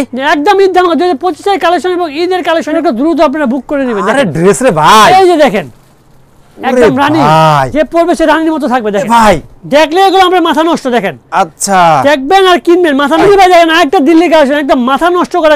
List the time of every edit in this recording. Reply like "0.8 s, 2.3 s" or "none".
2.7 s, 9.0 s, 13.2 s